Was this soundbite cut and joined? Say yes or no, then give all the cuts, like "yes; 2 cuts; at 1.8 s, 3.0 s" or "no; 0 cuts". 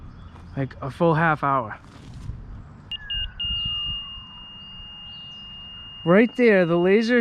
yes; 1 cut; at 3.0 s